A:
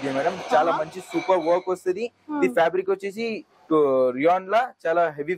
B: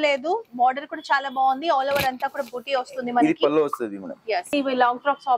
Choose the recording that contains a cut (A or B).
B